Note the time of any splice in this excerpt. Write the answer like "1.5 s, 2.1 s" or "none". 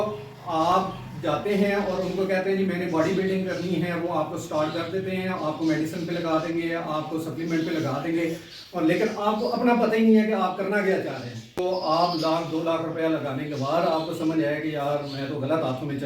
11.6 s